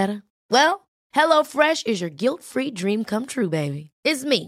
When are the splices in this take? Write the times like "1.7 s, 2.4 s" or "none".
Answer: none